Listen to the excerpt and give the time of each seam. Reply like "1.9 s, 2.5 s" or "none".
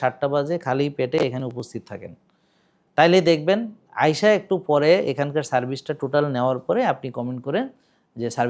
none